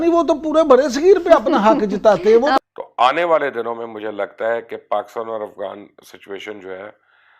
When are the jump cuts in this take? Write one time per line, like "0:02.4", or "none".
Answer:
0:02.6